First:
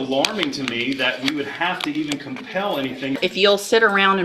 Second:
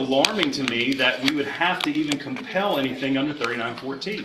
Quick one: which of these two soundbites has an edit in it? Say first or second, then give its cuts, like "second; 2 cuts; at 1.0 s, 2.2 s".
first; 1 cut; at 3.2 s